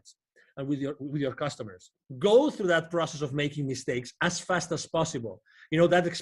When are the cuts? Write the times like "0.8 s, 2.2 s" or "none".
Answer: 2.0 s

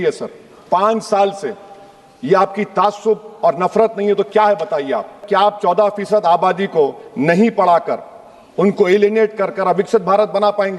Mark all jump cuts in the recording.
5.2 s

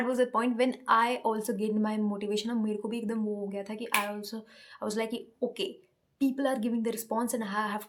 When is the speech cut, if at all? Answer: none

